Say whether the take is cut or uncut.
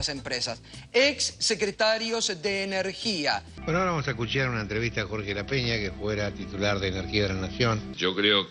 cut